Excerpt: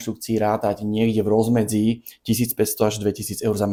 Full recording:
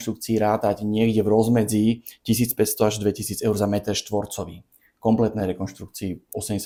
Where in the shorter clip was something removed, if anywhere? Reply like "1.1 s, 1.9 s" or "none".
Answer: none